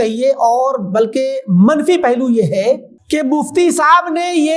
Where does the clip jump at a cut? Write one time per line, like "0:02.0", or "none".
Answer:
0:02.9